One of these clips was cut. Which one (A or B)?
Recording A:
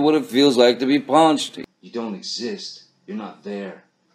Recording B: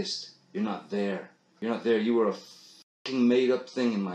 A